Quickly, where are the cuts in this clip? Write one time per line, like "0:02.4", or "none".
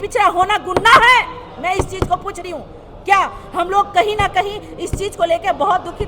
none